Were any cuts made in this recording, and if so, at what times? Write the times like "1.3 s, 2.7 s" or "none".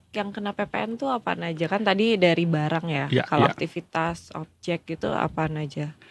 none